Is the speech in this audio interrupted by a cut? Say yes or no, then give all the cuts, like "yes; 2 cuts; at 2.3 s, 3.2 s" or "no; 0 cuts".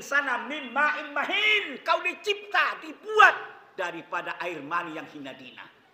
no; 0 cuts